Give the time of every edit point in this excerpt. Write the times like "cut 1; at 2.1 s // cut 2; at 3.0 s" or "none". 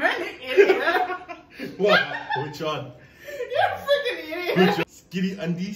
cut 1; at 4.8 s